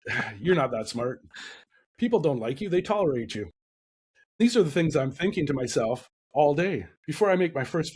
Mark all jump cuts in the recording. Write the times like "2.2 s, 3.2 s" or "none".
4.4 s, 7.0 s